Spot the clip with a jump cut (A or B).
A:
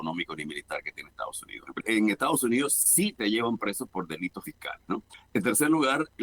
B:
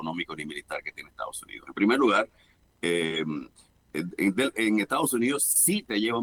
A